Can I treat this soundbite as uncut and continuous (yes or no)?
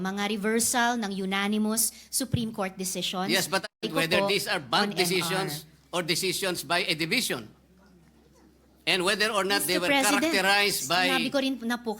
no